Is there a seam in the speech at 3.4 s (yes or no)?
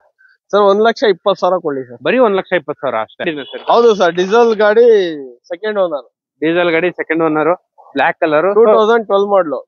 yes